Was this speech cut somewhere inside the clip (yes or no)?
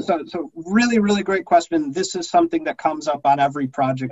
no